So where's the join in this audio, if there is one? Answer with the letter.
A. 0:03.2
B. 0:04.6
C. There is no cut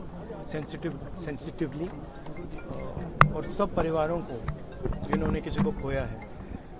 C